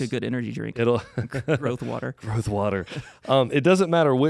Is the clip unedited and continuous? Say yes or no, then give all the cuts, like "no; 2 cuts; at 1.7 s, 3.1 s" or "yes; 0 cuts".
yes; 0 cuts